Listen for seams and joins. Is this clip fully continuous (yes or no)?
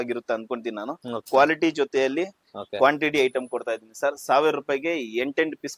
no